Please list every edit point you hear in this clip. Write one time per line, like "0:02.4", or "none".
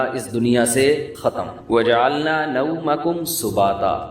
0:01.3